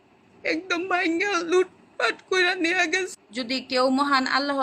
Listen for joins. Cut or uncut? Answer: cut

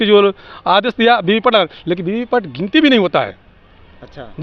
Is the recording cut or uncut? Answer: uncut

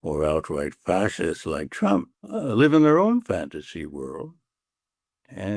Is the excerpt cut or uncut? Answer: cut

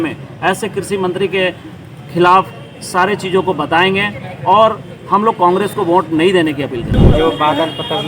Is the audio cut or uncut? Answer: cut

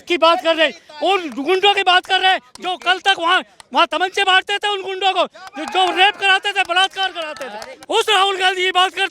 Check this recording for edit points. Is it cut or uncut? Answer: cut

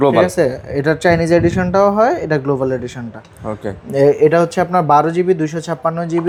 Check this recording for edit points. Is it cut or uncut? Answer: uncut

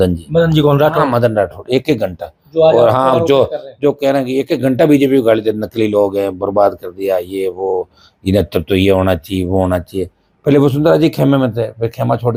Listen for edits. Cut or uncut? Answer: uncut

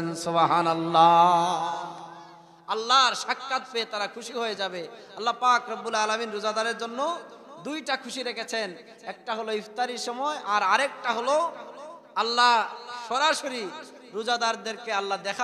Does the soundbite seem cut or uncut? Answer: uncut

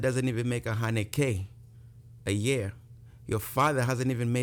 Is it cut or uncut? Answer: uncut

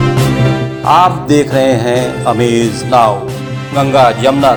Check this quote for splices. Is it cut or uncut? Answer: uncut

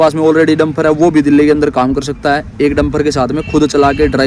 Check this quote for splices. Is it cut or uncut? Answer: uncut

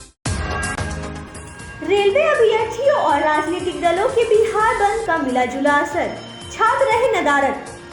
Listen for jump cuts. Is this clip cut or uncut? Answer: cut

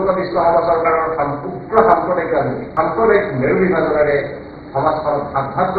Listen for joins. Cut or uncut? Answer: cut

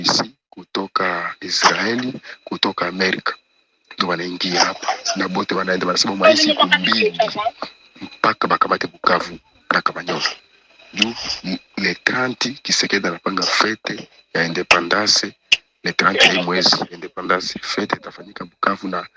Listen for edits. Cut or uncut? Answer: uncut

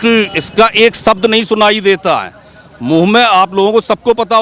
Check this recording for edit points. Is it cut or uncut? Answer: uncut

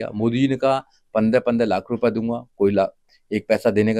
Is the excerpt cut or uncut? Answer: uncut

